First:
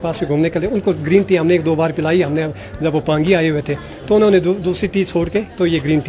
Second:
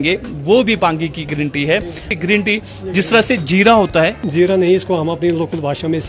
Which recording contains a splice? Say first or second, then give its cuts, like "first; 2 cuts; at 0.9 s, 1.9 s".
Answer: second; 2 cuts; at 2.1 s, 4.2 s